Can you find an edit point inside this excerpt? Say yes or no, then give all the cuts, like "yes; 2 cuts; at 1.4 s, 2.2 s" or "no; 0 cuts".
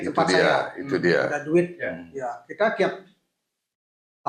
no; 0 cuts